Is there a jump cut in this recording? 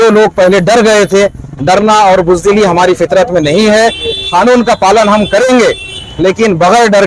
no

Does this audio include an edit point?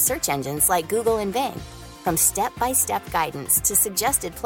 no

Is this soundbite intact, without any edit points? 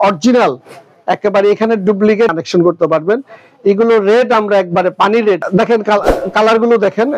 no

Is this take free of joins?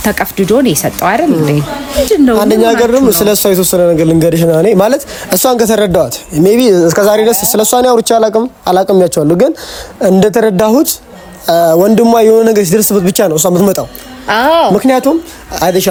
yes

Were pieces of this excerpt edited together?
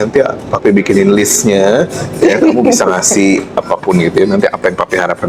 no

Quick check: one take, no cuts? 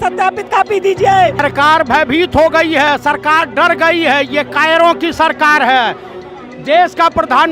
no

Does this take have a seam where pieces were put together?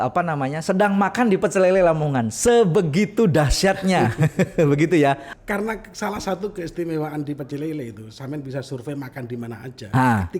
yes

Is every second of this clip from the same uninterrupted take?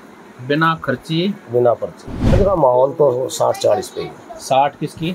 no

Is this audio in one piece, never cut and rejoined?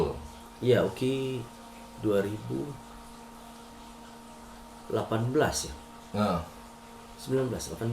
yes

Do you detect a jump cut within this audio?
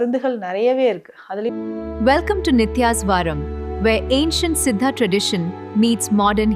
yes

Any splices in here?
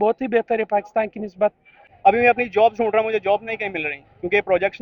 yes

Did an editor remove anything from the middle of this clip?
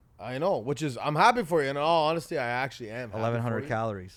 no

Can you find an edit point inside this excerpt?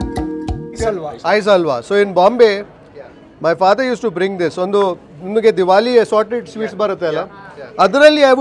no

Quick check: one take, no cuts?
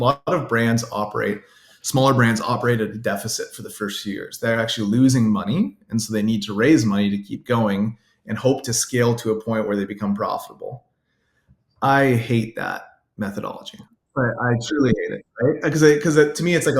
yes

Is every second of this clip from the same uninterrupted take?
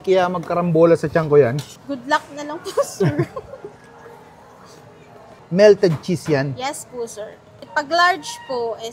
yes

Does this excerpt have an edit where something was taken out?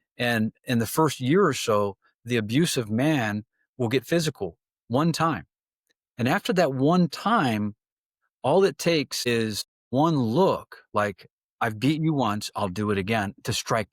no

